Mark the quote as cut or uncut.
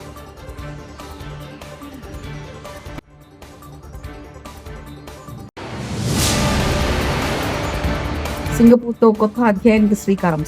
cut